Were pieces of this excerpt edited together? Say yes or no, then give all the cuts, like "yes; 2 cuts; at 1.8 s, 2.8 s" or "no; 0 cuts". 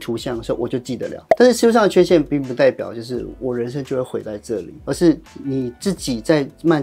yes; 2 cuts; at 1.2 s, 4.7 s